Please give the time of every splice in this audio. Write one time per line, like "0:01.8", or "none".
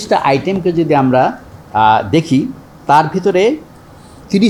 none